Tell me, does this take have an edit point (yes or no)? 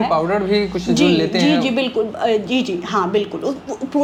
no